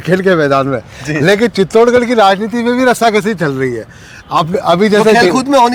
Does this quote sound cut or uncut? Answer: uncut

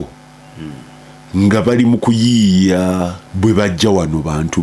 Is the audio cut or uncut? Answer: cut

